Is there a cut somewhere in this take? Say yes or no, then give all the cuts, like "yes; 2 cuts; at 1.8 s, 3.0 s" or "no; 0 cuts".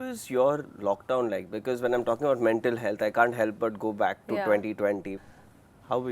yes; 1 cut; at 5.2 s